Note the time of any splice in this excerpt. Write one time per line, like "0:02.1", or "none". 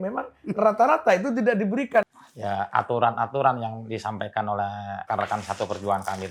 0:02.1
0:05.1